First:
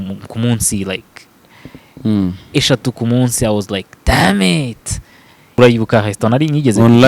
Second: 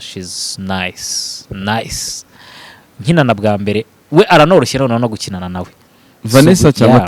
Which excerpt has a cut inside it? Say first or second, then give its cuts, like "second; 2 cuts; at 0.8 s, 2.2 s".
first; 1 cut; at 5.5 s